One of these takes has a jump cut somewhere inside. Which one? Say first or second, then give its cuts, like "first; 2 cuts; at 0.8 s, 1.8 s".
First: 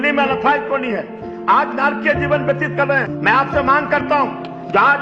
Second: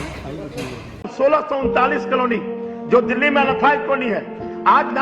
second; 1 cut; at 0.9 s